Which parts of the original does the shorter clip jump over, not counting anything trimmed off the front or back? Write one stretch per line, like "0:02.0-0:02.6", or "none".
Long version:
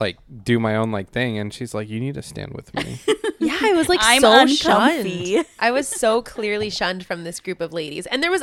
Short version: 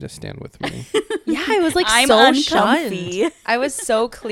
none